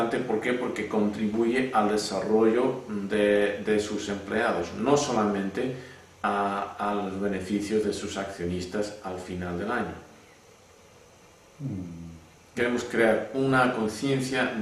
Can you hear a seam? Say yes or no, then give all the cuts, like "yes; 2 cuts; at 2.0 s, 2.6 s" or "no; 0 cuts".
yes; 1 cut; at 8.4 s